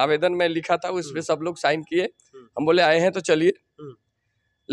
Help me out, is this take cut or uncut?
uncut